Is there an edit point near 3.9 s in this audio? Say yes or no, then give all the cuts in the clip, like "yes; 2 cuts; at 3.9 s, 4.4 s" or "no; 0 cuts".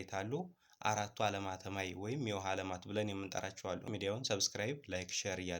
yes; 1 cut; at 3.9 s